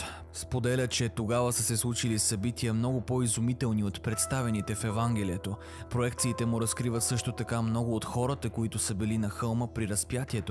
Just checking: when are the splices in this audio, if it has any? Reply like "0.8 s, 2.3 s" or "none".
none

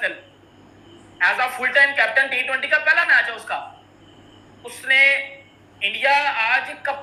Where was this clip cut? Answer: none

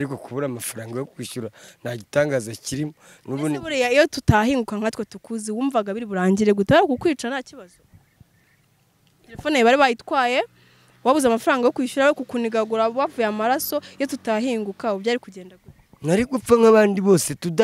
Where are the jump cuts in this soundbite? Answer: none

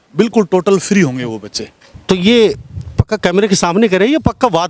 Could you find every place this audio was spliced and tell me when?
none

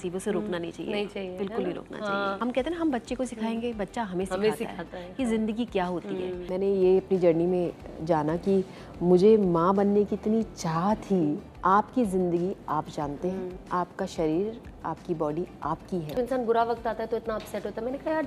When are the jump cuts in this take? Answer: 2.4 s, 6.5 s, 11.5 s, 13.6 s, 16.2 s

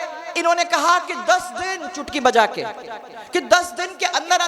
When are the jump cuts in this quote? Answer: none

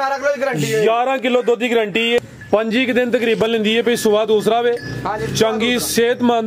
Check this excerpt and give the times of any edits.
2.2 s

